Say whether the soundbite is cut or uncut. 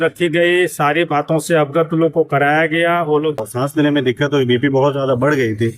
cut